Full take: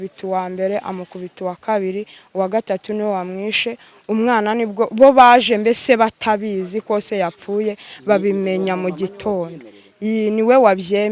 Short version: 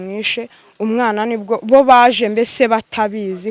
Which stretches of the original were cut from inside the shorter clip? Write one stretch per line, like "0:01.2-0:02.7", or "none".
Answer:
none

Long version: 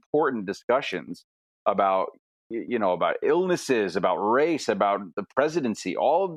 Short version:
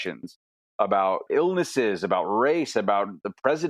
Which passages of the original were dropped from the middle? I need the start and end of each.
0:02.1-0:03.2

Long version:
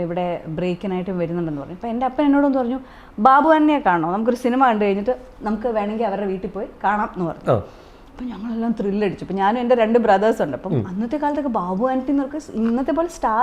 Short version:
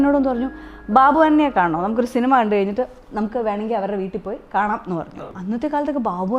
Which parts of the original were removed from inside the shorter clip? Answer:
0:07.4-0:10.6

